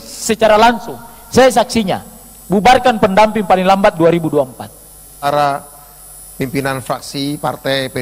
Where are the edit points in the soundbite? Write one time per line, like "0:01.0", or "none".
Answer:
0:05.2